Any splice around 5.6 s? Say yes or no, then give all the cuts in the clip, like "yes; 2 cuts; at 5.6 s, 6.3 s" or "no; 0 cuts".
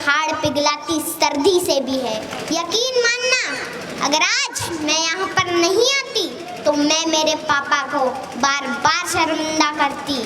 no; 1 cut; at 2.3 s